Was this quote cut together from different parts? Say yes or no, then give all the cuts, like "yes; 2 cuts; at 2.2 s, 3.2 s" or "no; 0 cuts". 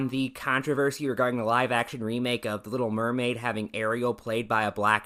no; 0 cuts